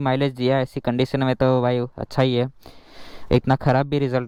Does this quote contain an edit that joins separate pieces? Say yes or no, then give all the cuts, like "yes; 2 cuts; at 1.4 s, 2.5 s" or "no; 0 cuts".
no; 0 cuts